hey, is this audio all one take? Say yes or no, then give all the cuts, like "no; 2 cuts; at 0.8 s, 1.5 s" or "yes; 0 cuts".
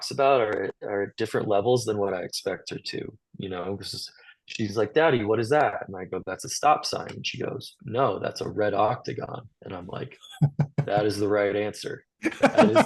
yes; 0 cuts